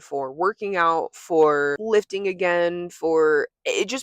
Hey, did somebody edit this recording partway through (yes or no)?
yes